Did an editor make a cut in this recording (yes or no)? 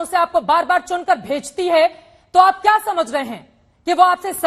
no